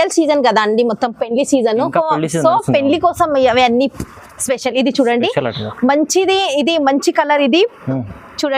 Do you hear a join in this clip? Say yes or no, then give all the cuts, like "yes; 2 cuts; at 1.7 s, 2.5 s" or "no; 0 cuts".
no; 0 cuts